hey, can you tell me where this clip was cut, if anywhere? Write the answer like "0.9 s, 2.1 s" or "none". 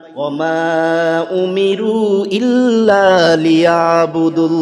none